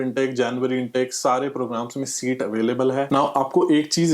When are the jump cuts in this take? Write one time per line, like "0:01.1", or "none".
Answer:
0:03.1